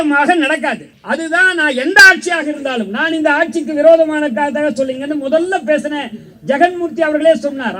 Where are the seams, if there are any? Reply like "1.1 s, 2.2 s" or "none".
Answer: 0.9 s